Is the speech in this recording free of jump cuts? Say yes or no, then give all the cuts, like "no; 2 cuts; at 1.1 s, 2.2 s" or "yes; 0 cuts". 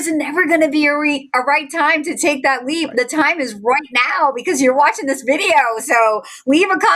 yes; 0 cuts